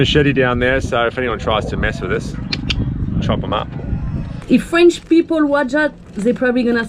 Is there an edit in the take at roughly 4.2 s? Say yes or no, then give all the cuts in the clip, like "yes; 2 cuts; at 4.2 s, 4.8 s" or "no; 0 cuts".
yes; 1 cut; at 4.2 s